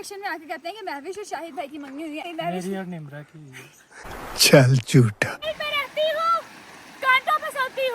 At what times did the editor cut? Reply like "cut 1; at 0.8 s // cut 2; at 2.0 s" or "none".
cut 1; at 2.2 s // cut 2; at 5.4 s